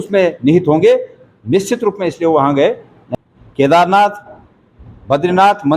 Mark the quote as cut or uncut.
cut